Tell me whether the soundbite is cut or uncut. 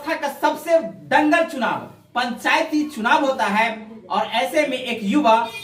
uncut